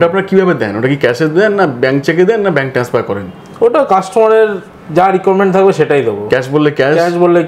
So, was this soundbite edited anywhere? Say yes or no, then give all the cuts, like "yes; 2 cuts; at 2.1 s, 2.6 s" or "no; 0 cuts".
no; 0 cuts